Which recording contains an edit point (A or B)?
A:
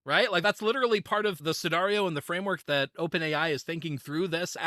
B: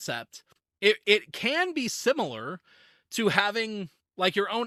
A